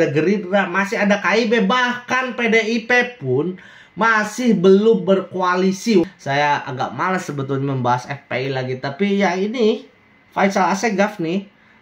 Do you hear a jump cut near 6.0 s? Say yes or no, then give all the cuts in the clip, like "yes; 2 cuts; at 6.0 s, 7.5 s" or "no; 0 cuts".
yes; 1 cut; at 6.0 s